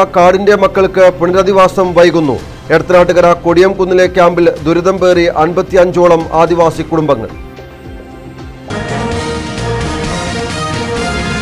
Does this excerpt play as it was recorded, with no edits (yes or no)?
no